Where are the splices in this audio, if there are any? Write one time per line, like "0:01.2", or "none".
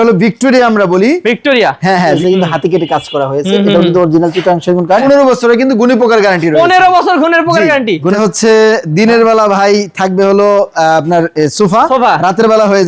0:02.2
0:05.0
0:08.1